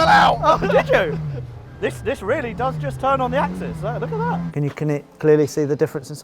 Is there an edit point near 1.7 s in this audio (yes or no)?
no